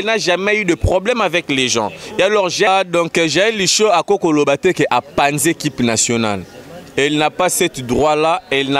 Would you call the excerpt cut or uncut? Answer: cut